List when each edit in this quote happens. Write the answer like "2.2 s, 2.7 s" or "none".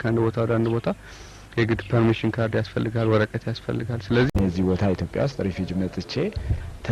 4.3 s